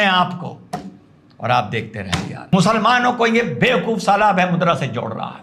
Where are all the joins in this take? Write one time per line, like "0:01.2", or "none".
0:02.5